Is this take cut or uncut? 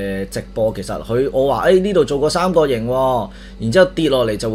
uncut